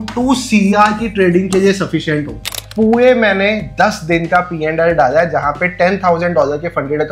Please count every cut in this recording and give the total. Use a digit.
1